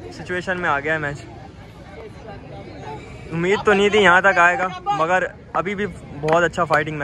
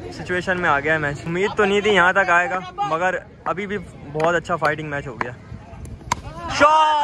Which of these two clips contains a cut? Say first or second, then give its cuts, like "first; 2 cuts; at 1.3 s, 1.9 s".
second; 1 cut; at 1.2 s